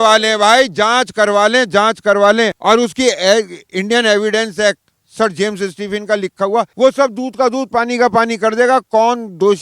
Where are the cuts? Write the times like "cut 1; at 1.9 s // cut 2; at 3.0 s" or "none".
cut 1; at 2.6 s // cut 2; at 6.7 s